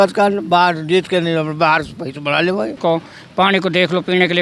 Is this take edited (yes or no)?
yes